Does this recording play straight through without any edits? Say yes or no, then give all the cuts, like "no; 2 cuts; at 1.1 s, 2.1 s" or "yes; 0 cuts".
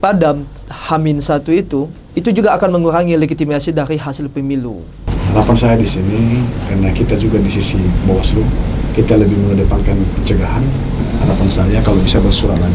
no; 2 cuts; at 2.0 s, 5.1 s